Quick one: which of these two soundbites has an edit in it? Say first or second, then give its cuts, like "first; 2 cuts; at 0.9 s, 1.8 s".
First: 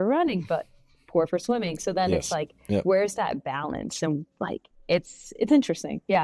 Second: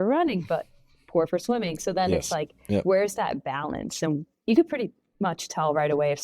second; 1 cut; at 4.3 s